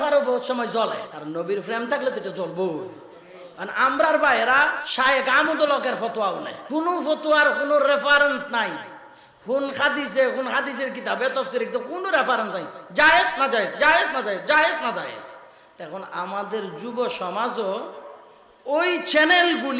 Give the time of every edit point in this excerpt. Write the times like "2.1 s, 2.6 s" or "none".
1.1 s, 4.8 s, 6.5 s

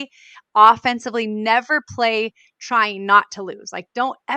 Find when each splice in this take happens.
none

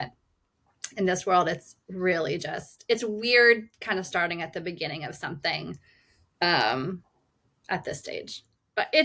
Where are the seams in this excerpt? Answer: none

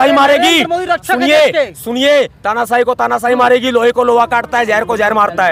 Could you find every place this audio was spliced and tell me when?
none

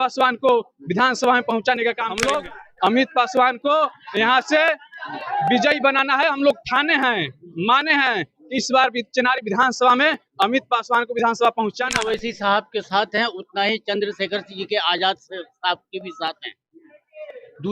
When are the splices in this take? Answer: 2.2 s, 11.9 s

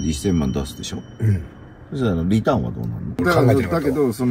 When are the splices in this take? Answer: 3.2 s

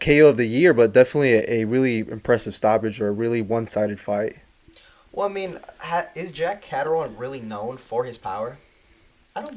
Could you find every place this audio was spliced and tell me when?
none

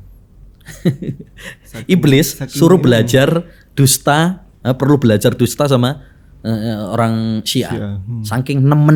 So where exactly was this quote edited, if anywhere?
none

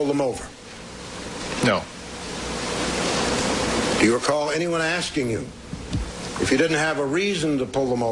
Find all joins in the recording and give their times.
2.6 s

